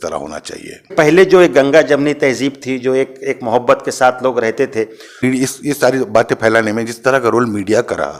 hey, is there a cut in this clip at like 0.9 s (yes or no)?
yes